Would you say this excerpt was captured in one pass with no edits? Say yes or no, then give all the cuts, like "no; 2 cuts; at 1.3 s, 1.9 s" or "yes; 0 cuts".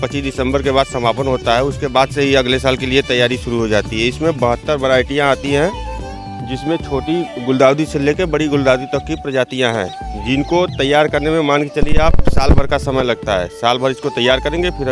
yes; 0 cuts